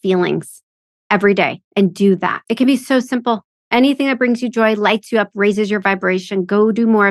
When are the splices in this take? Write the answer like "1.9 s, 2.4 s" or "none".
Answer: 2.4 s